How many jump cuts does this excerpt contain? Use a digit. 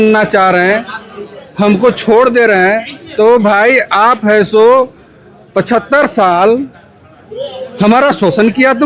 0